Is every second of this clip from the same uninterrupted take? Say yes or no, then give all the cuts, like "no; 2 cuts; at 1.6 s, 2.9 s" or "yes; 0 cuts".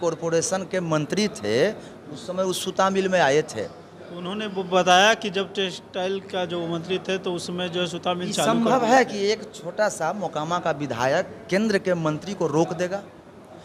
yes; 0 cuts